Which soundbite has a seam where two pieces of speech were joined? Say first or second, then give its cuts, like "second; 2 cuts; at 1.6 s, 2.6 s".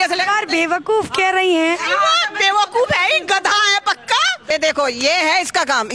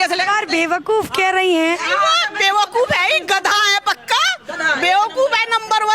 first; 1 cut; at 4.5 s